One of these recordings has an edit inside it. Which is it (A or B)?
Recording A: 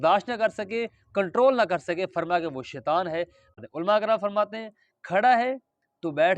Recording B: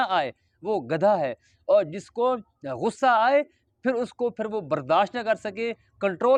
A